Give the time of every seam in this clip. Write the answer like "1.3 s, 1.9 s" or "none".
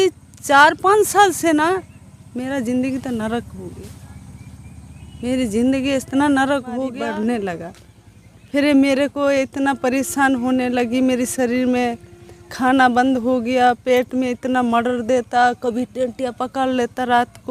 6.9 s